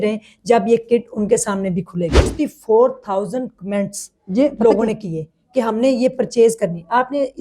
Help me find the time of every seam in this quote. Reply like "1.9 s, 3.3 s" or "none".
2.2 s